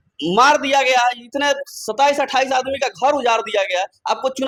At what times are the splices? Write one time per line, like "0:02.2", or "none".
none